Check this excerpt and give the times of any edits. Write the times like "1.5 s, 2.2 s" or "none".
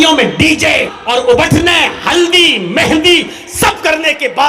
0.9 s